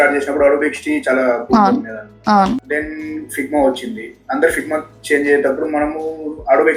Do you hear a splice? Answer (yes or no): no